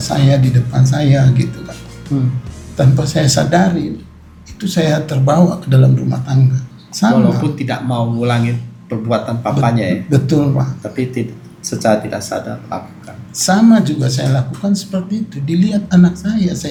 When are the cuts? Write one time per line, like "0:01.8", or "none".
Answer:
none